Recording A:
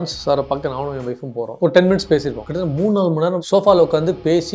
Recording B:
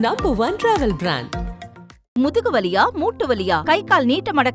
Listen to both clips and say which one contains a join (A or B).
A